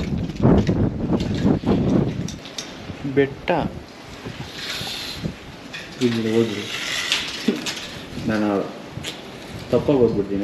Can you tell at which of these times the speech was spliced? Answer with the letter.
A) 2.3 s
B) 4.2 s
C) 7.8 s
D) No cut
A